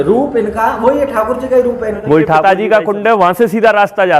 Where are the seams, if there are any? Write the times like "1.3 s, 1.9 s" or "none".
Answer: 2.4 s

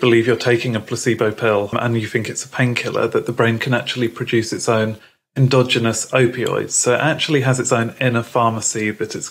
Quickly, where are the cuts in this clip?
1.7 s

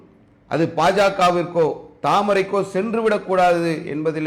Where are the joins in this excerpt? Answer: none

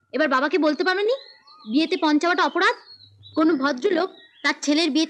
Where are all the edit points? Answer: none

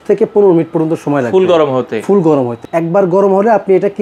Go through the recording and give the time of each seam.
2.6 s

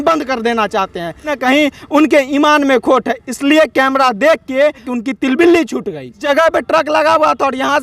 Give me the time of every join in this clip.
1.4 s, 4.9 s, 6.2 s

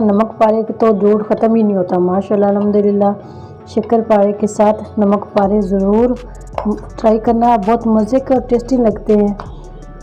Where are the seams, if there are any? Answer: none

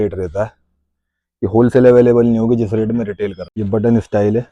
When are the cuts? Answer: 3.5 s

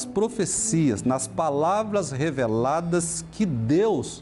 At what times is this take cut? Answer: none

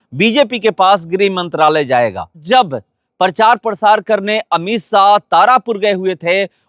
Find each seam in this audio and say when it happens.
2.4 s

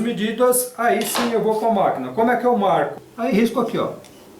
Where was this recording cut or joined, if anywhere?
3.0 s

